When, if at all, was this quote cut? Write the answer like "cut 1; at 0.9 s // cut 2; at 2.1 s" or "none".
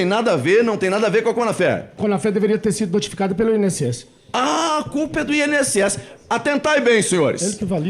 cut 1; at 2.0 s